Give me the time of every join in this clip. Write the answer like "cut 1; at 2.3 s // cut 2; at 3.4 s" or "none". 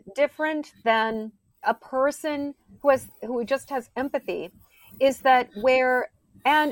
cut 1; at 1.6 s